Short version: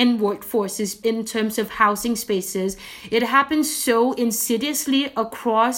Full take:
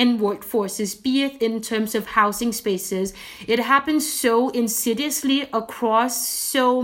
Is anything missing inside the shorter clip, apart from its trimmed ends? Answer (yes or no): yes